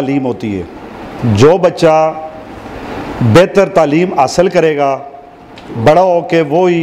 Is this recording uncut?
yes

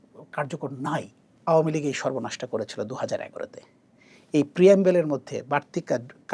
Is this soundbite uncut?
no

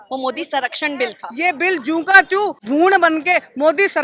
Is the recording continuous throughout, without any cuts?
no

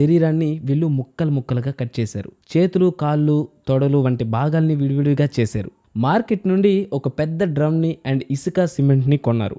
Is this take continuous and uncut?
yes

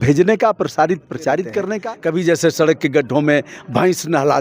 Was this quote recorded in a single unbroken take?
no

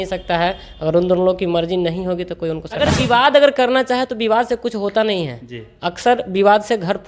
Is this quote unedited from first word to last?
no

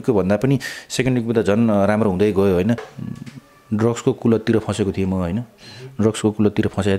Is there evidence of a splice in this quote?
yes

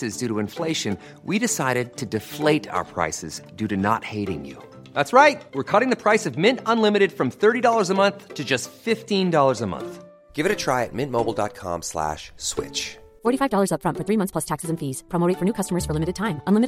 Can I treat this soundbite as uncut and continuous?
yes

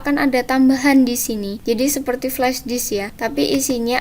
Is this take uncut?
no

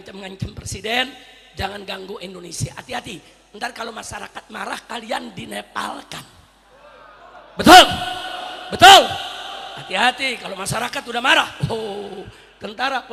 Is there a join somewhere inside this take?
no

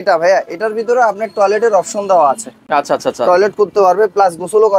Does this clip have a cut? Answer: no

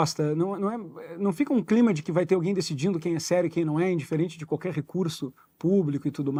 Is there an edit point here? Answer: no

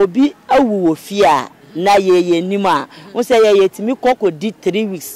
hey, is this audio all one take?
yes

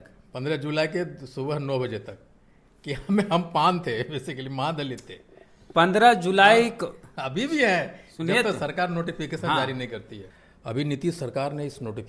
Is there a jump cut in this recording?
yes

